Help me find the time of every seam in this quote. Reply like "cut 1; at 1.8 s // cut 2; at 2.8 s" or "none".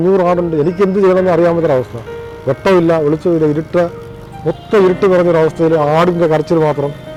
none